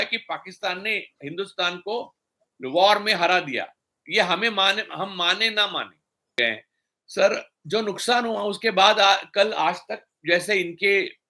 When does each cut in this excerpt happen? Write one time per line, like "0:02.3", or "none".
0:06.3